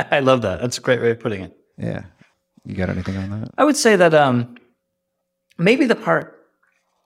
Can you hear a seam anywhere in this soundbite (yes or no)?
no